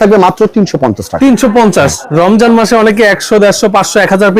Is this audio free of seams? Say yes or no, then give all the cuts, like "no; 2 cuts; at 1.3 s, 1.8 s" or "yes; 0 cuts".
no; 1 cut; at 2.0 s